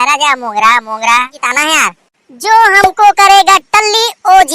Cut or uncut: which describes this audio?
cut